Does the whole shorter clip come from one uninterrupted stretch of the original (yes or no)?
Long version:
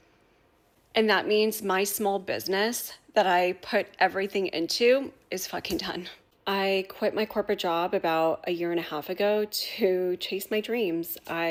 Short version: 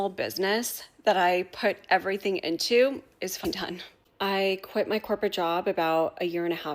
no